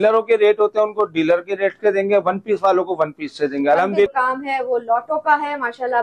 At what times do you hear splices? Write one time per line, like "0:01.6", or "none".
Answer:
0:04.1